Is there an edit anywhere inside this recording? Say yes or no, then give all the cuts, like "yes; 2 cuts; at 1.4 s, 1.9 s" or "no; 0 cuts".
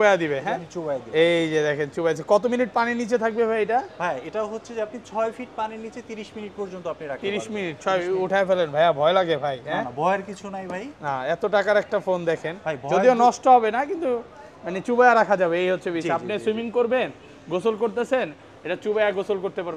no; 0 cuts